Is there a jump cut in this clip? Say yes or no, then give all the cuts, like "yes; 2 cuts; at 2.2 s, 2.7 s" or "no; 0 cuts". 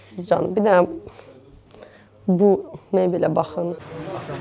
no; 0 cuts